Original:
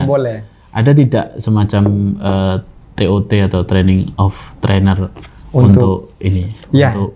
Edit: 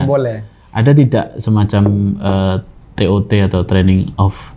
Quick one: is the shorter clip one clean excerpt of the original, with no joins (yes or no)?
yes